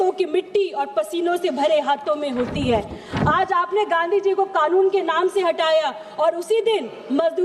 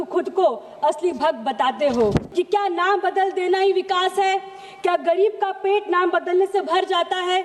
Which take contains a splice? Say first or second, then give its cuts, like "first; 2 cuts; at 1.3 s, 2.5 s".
second; 1 cut; at 2.3 s